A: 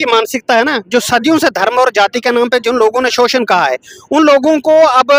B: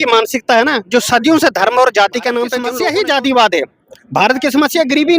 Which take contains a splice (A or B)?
B